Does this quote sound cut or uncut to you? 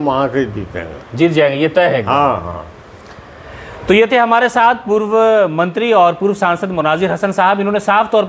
uncut